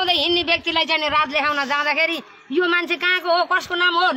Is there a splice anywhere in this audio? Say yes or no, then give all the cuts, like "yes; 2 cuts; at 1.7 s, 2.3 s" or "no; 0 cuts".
no; 0 cuts